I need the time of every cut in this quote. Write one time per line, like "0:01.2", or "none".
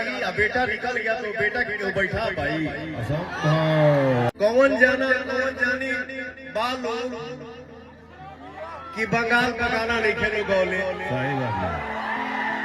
0:04.3